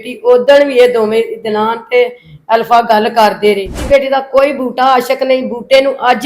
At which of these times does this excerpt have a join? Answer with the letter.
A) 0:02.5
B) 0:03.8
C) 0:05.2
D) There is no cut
B